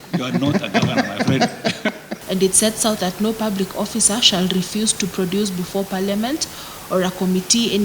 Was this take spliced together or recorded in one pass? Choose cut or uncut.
cut